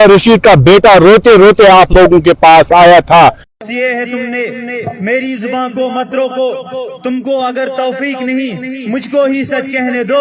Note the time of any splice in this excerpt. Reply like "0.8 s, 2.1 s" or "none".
3.4 s